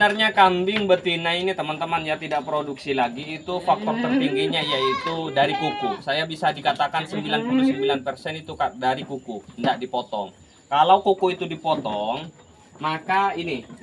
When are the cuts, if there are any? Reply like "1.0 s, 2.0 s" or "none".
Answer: none